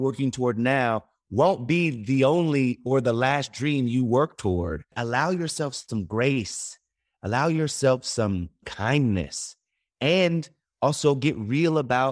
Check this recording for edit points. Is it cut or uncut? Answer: cut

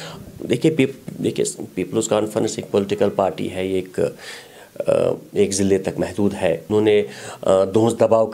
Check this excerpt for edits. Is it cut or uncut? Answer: cut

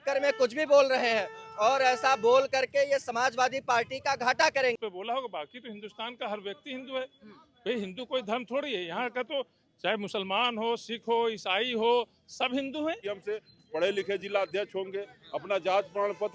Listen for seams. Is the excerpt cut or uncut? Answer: cut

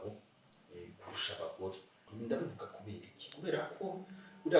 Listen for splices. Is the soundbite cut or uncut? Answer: cut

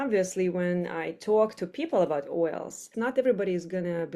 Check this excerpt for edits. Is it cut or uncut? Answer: cut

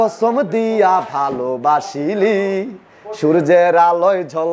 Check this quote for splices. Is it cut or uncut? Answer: uncut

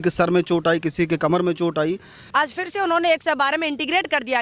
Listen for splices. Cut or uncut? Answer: cut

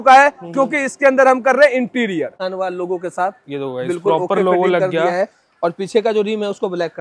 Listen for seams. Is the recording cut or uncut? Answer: cut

